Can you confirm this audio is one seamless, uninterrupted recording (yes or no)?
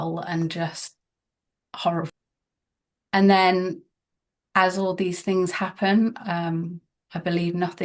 no